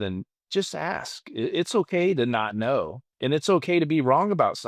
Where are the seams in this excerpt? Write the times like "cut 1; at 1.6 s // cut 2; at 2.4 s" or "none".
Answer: cut 1; at 3.1 s